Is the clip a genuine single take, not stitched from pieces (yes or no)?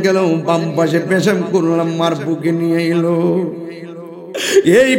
yes